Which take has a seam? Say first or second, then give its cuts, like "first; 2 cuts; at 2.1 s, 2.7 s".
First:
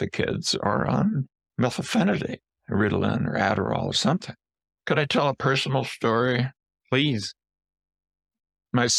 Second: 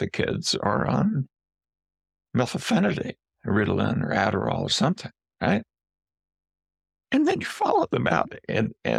first; 2 cuts; at 1.4 s, 4.5 s